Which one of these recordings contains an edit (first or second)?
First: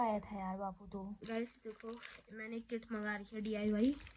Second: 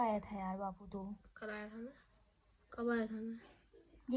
first